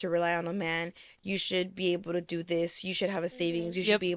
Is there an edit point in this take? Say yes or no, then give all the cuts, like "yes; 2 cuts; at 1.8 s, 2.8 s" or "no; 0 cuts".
no; 0 cuts